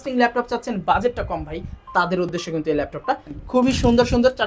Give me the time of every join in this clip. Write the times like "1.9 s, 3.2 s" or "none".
3.3 s